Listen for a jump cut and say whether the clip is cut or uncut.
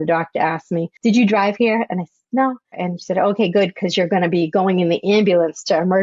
cut